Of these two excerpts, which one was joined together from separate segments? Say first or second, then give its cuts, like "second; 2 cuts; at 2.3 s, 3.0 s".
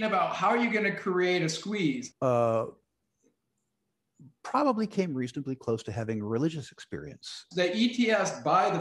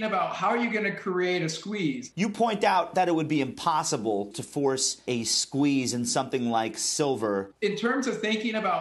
second; 2 cuts; at 2.1 s, 7.5 s